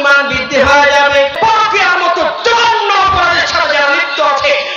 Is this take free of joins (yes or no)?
no